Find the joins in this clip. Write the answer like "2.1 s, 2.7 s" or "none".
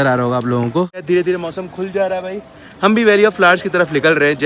1.0 s